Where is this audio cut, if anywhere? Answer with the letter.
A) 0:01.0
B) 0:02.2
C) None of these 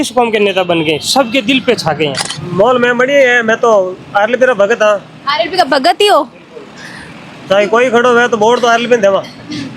B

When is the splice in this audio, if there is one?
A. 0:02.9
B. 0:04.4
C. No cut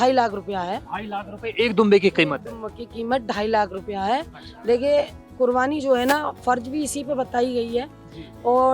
C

